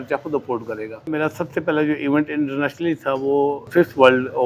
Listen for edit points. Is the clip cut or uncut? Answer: cut